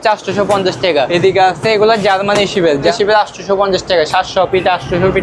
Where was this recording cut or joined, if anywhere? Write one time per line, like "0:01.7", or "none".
0:01.1
0:02.9